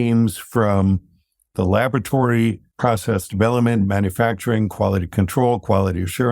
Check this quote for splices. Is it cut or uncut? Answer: cut